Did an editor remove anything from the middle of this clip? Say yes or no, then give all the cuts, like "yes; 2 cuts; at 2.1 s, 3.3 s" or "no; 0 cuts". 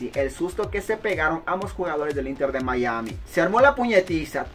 yes; 1 cut; at 3.2 s